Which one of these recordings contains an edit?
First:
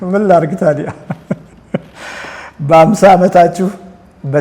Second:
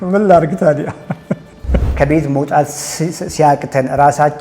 second; 1 cut; at 1.9 s

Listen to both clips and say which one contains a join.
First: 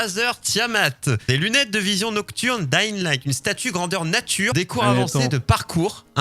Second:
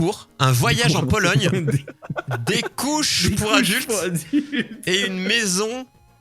first; 2 cuts; at 1.2 s, 4.5 s

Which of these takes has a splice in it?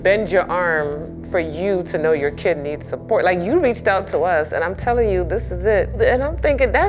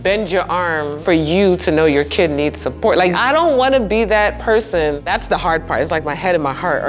second; 3 cuts; at 0.9 s, 3.1 s, 5.0 s

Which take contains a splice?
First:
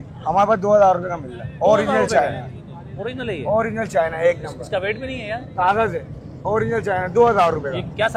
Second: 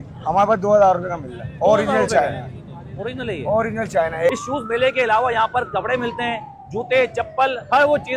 second; 1 cut; at 4.3 s

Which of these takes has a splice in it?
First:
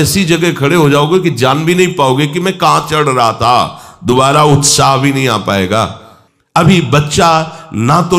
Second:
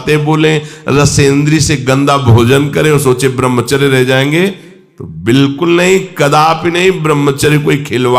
first; 1 cut; at 6.6 s

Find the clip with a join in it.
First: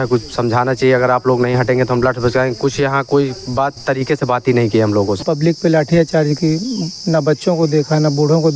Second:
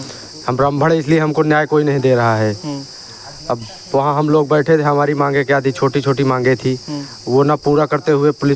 first; 1 cut; at 5.2 s

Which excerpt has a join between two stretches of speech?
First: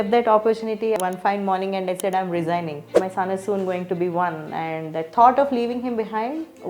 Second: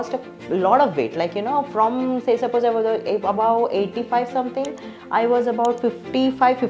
first; 2 cuts; at 1.0 s, 3.0 s

